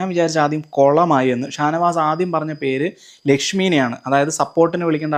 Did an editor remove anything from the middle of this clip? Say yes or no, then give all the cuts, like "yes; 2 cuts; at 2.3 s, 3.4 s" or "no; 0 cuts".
no; 0 cuts